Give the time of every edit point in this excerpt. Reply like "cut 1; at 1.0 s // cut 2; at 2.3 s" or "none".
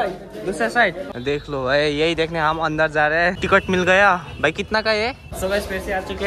cut 1; at 1.0 s // cut 2; at 3.4 s // cut 3; at 5.3 s